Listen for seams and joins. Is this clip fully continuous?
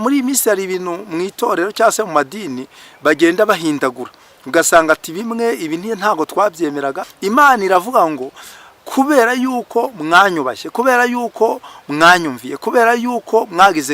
no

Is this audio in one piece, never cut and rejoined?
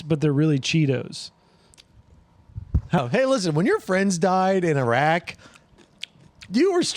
no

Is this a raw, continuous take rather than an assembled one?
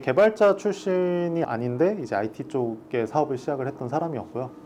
yes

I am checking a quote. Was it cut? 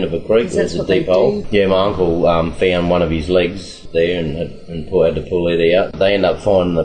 yes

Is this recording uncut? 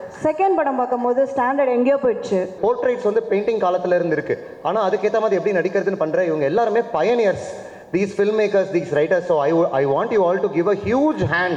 no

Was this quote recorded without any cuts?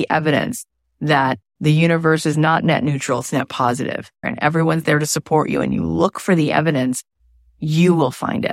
no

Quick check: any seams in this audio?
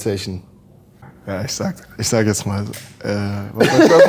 yes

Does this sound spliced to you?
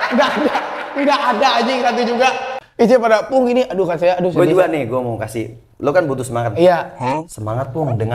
no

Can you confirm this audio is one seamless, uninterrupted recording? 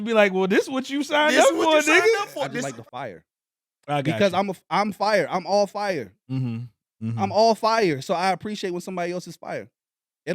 no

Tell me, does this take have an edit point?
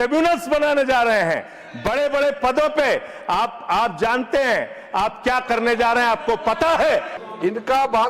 yes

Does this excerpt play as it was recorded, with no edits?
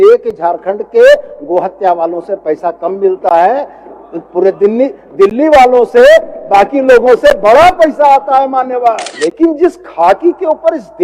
no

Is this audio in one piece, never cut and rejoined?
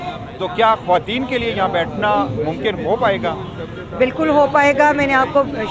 yes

